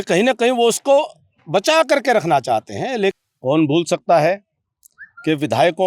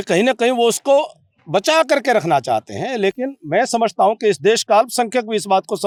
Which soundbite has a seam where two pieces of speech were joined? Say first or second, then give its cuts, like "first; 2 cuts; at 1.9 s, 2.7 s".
first; 1 cut; at 3.2 s